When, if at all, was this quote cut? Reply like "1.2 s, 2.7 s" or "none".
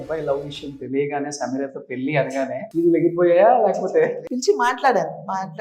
2.7 s, 4.3 s